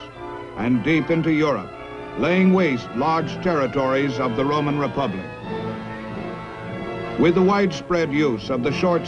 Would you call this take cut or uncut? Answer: uncut